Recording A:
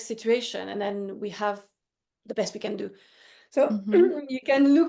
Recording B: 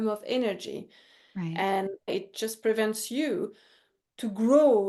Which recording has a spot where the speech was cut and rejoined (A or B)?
B